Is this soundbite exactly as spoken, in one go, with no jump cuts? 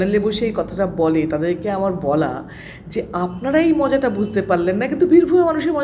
yes; 0 cuts

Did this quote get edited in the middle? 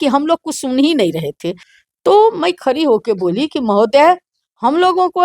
yes; 1 cut; at 1.7 s

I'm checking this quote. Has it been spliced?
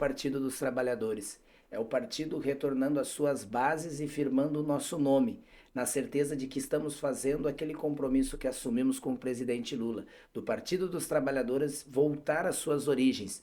no; 0 cuts

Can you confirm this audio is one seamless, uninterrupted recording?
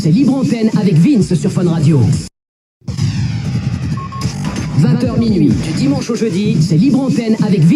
yes; 0 cuts

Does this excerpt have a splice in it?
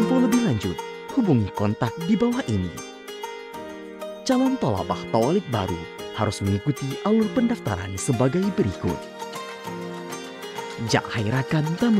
no; 0 cuts

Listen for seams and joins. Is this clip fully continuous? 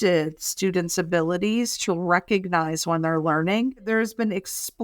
no; 1 cut; at 3.9 s

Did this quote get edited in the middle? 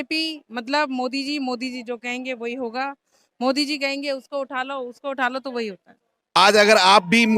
yes; 1 cut; at 6.4 s

